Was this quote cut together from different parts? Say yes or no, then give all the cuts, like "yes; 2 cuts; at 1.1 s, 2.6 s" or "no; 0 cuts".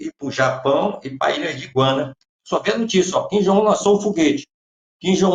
yes; 1 cut; at 2.4 s